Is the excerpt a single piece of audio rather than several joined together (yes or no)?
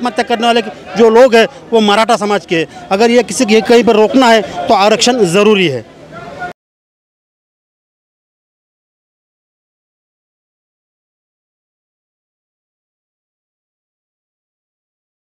yes